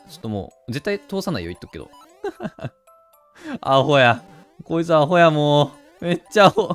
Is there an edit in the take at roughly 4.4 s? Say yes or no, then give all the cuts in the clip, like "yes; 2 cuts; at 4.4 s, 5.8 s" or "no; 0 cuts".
no; 1 cut; at 2.0 s